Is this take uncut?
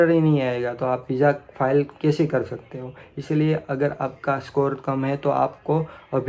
yes; 0 cuts

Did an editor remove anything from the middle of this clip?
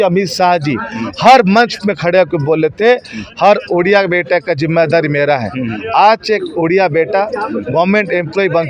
no; 0 cuts

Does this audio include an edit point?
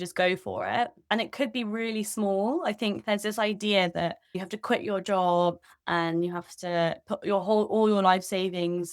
yes; 2 cuts; at 1.1 s, 4.3 s

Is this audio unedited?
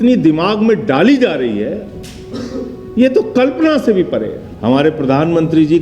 no; 1 cut; at 4.4 s

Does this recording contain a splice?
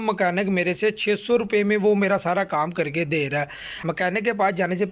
yes; 1 cut; at 3.8 s

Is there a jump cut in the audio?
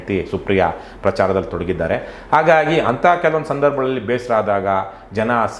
no; 0 cuts

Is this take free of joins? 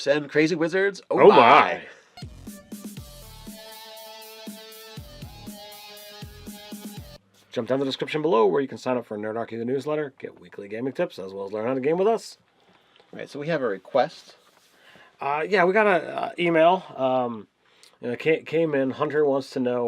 no; 1 cut; at 18.5 s

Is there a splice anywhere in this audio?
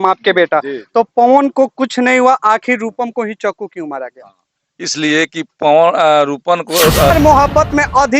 yes; 1 cut; at 7.1 s

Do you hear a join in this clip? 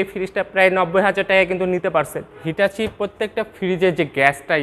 yes; 1 cut; at 2.4 s

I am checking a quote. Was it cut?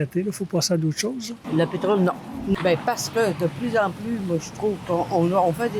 yes; 2 cuts; at 1.3 s, 2.5 s

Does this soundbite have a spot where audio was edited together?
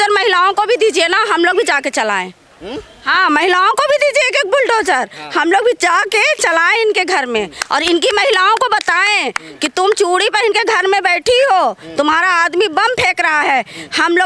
no; 0 cuts

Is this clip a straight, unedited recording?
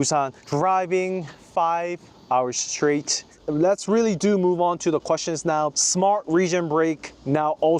yes; 0 cuts

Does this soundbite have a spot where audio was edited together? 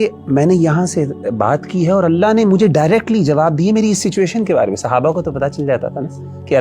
no; 0 cuts

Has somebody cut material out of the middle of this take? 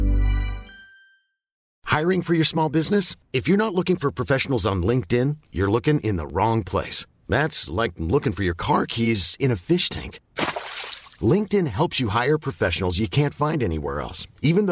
yes; 1 cut; at 1.6 s

